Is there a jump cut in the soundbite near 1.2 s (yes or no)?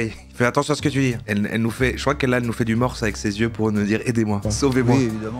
yes